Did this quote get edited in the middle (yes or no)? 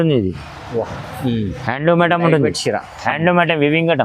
no